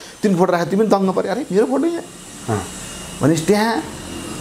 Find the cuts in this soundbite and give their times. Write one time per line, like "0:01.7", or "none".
none

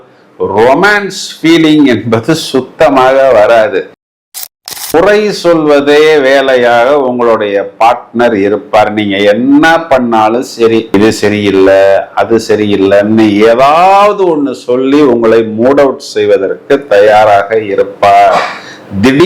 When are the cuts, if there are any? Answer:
0:04.3

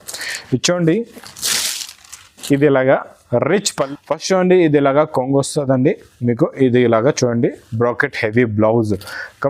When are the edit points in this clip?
0:03.9

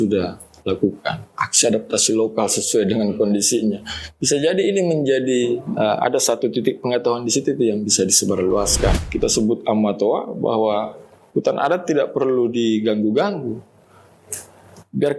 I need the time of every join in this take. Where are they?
0:09.0

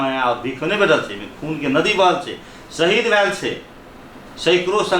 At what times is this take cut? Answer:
none

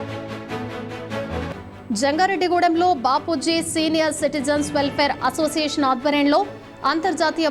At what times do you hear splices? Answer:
none

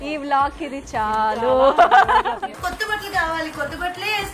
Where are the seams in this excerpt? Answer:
0:02.6

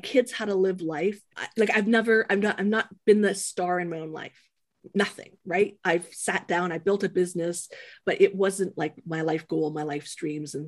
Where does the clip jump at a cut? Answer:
0:01.4

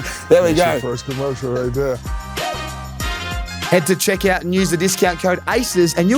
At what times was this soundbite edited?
0:02.1
0:03.7

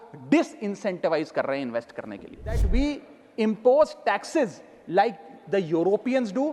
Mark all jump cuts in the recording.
0:02.7

